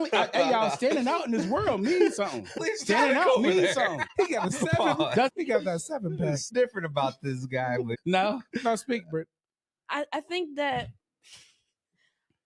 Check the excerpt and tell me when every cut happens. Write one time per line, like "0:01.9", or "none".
0:02.6
0:04.0
0:05.3
0:06.5
0:07.9